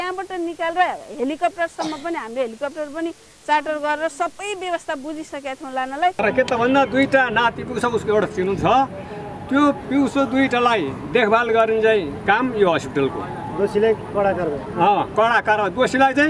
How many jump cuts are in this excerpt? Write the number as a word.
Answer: one